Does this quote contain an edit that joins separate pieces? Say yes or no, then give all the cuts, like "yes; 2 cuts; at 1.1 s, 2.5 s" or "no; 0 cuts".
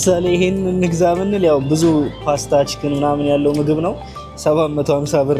no; 0 cuts